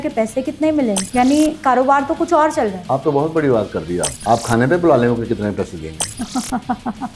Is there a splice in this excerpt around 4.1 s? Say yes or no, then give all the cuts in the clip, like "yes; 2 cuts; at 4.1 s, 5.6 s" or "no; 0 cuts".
yes; 3 cuts; at 1.0 s, 4.1 s, 6.0 s